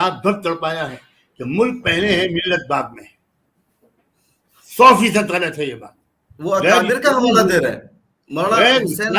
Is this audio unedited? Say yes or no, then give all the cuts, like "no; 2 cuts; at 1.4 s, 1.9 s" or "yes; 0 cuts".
yes; 0 cuts